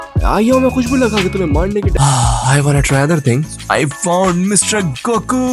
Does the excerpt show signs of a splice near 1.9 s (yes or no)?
yes